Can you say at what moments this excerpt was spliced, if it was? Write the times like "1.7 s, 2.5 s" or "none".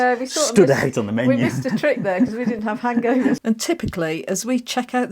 3.4 s